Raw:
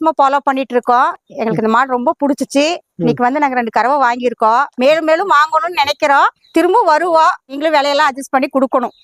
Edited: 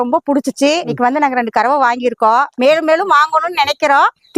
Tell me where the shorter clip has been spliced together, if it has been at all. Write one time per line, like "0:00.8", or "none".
0:00.9